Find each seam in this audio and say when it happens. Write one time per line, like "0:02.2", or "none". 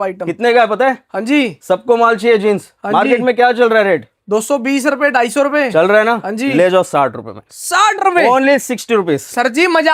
none

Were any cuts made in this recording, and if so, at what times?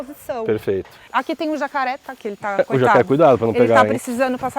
0:01.0

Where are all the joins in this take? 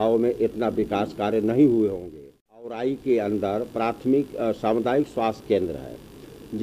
0:02.7

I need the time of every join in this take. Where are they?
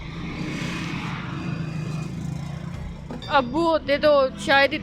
0:03.1

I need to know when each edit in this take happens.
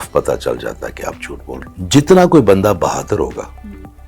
0:01.6

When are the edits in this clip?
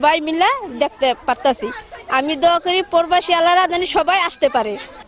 none

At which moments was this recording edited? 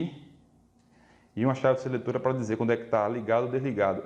none

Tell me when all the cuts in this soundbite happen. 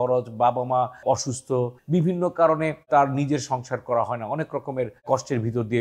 0:01.8

